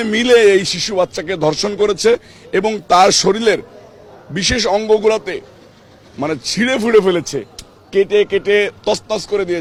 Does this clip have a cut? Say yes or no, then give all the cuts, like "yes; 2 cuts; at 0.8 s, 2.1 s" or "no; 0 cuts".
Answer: no; 0 cuts